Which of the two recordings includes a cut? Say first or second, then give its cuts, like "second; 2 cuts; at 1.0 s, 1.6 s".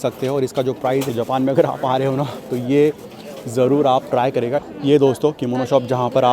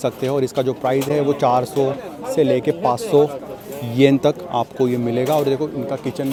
first; 2 cuts; at 1.1 s, 4.6 s